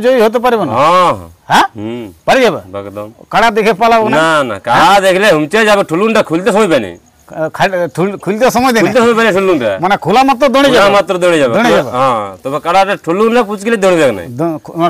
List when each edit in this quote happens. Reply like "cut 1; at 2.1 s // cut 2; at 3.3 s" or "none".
none